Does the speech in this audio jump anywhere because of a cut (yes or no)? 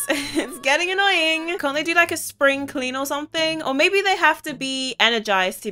yes